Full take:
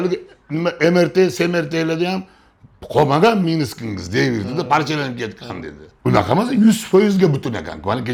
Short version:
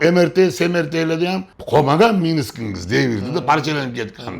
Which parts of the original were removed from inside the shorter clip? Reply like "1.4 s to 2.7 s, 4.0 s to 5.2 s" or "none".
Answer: 2.3 s to 2.7 s